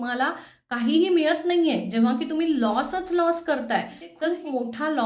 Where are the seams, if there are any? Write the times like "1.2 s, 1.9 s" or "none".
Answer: 4.1 s

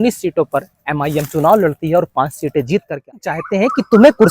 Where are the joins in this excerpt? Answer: 3.4 s

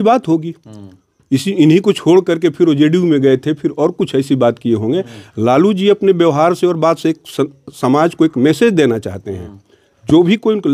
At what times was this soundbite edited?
none

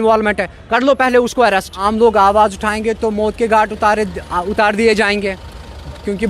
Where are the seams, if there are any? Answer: 1.8 s

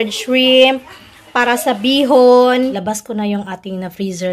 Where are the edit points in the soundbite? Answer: 2.8 s

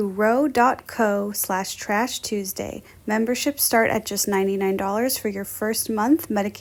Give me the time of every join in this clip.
none

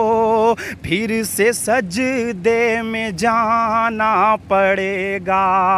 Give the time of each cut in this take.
none

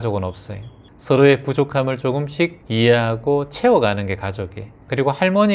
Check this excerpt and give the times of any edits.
2.6 s

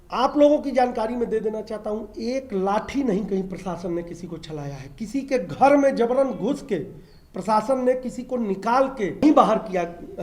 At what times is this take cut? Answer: 9.2 s

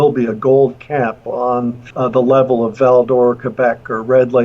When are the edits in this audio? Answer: 1.8 s

